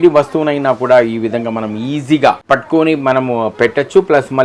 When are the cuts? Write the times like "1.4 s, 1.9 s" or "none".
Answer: 2.4 s